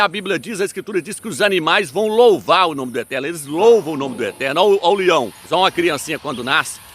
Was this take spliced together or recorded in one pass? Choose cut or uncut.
cut